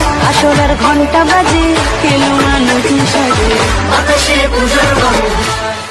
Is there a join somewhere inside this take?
no; 0 cuts

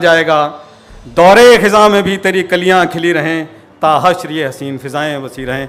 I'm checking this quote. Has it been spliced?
no; 0 cuts

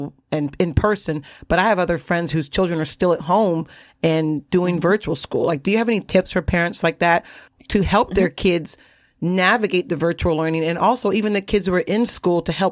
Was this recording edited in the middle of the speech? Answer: no; 0 cuts

